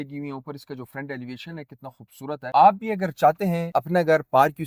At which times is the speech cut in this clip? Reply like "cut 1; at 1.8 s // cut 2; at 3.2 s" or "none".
none